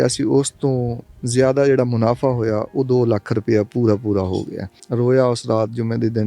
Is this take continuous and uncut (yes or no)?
no